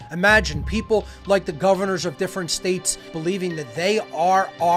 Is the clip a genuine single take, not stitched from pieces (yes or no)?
yes